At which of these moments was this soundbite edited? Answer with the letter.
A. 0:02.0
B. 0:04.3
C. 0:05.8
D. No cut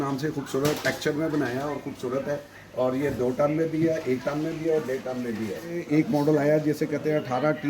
C